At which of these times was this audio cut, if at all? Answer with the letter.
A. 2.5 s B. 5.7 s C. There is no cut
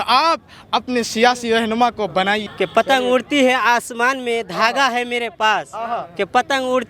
A